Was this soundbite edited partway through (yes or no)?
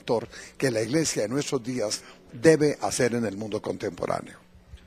yes